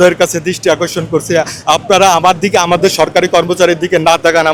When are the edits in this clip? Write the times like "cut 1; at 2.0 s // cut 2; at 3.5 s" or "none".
none